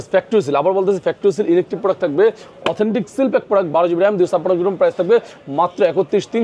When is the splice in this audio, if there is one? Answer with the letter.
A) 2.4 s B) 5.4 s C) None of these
C